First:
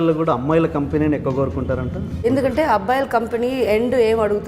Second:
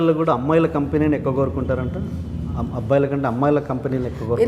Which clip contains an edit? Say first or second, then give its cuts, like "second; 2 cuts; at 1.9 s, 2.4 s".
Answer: first; 1 cut; at 2.2 s